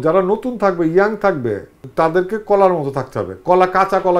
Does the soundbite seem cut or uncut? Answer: cut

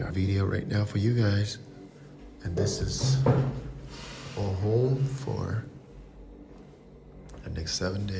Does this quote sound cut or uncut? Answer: uncut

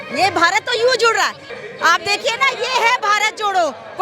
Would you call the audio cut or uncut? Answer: cut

